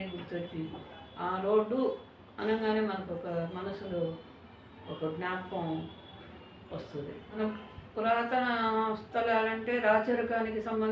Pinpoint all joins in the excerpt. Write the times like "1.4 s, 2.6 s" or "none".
7.4 s